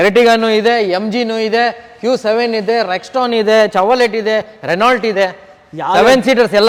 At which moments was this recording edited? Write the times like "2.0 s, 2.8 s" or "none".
none